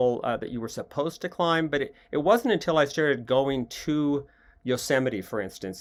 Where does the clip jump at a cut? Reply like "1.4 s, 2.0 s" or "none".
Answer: none